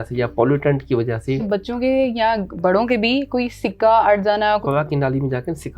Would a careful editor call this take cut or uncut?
cut